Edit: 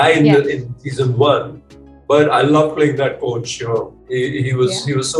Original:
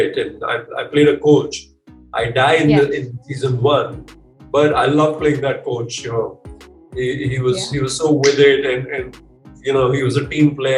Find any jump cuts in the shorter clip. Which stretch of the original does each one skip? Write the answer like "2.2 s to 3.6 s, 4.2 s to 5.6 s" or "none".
6.4 s to 6.8 s